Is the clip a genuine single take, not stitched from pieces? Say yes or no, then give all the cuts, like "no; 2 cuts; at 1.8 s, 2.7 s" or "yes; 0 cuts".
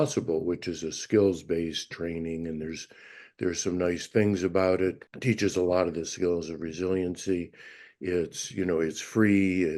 no; 1 cut; at 5.1 s